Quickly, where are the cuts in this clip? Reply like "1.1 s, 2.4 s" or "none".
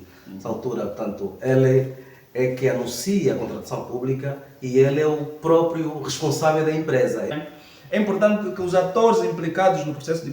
7.3 s